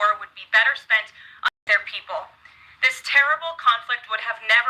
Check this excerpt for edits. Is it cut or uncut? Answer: cut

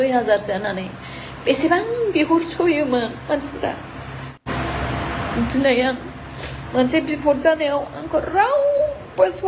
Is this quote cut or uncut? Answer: cut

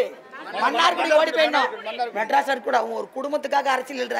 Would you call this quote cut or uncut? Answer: uncut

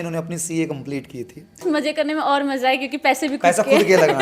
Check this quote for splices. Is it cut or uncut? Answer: cut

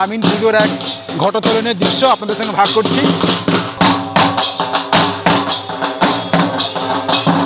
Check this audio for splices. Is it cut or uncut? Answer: uncut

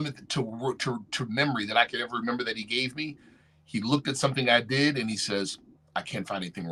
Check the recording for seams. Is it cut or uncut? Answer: uncut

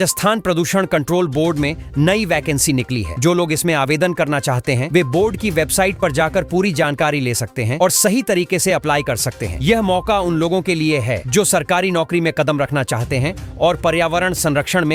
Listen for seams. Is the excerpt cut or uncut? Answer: uncut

